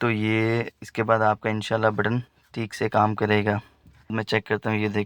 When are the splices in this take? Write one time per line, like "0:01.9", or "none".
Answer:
0:04.1